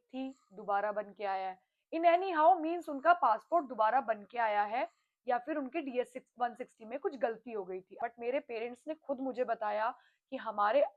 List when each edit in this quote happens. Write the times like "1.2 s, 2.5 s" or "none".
7.9 s